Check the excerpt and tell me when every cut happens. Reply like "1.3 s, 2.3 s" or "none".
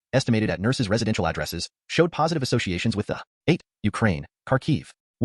3.2 s